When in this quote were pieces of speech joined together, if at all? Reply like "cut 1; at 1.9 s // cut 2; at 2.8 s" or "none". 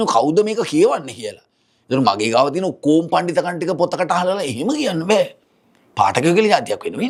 none